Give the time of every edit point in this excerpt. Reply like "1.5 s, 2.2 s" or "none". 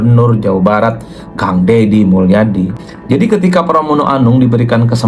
2.8 s